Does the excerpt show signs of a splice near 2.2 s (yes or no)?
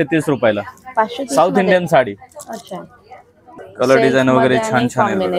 no